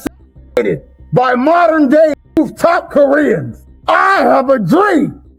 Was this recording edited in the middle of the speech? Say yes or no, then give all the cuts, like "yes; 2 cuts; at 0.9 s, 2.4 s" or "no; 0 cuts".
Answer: no; 0 cuts